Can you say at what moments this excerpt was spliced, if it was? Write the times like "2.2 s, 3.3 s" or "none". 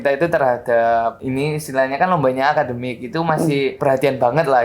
1.2 s, 3.8 s